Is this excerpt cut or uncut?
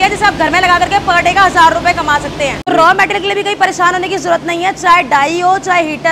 cut